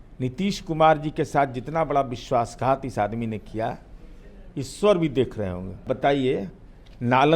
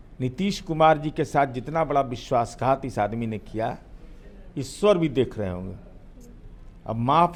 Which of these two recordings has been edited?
first; 1 cut; at 5.8 s

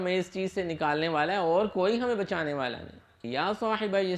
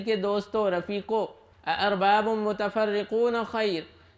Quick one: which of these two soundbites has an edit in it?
first; 1 cut; at 3.2 s

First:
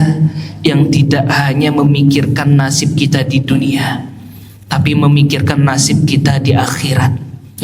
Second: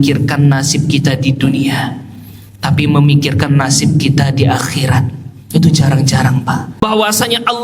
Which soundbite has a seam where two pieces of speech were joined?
second; 1 cut; at 6.7 s

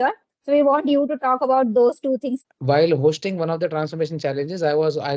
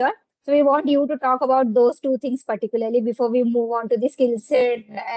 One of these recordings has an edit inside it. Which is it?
first; 1 cut; at 2.4 s

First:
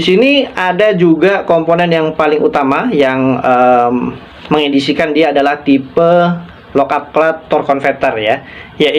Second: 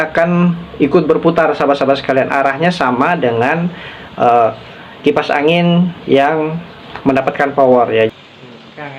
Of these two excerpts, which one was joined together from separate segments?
second; 1 cut; at 8.1 s

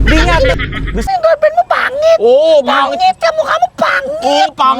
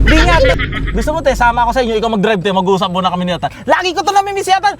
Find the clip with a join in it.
first; 1 cut; at 1.1 s

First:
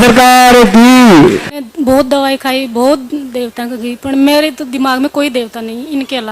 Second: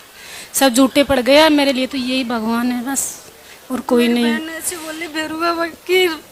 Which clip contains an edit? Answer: first; 1 cut; at 1.7 s

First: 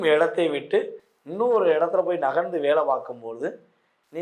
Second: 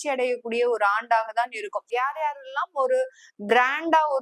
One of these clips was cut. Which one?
second; 1 cut; at 1.9 s

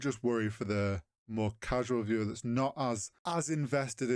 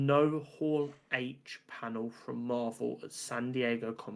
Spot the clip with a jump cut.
first; 1 cut; at 3.1 s

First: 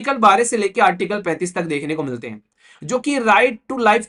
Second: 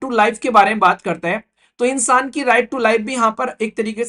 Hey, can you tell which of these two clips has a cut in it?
first; 1 cut; at 2.6 s

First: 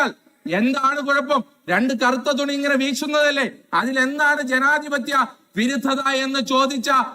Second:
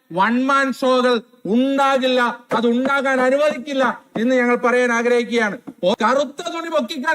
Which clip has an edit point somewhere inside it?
second; 1 cut; at 5.9 s

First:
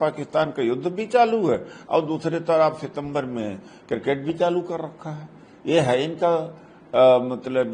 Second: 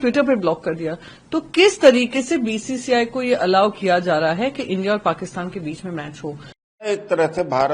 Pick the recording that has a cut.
second; 1 cut; at 6.8 s

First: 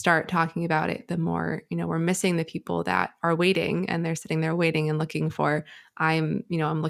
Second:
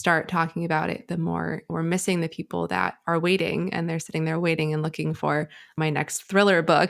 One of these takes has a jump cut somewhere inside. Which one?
second; 2 cuts; at 1.7 s, 5.8 s

